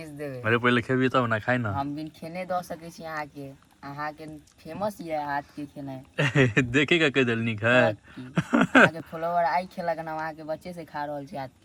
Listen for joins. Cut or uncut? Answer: uncut